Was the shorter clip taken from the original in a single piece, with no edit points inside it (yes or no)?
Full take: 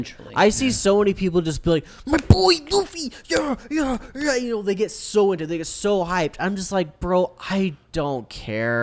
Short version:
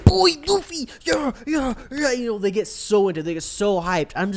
yes